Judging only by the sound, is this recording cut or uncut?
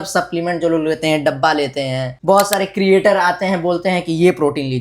cut